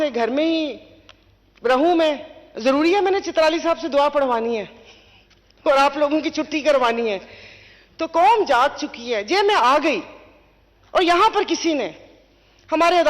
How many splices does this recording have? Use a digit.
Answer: 0